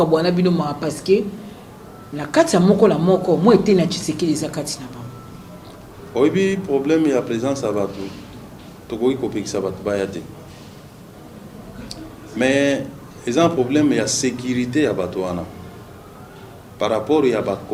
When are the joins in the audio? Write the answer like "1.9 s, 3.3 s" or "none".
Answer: none